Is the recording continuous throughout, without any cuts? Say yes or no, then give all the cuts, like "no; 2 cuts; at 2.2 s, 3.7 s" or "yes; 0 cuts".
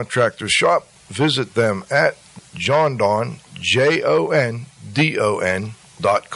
no; 1 cut; at 2.4 s